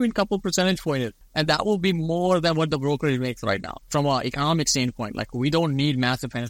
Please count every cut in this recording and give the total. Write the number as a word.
two